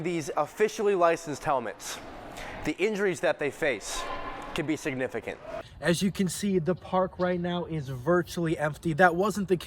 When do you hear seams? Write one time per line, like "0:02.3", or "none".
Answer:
0:05.6